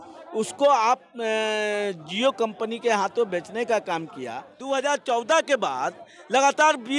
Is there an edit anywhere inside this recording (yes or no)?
yes